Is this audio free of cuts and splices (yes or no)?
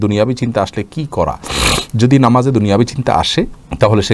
yes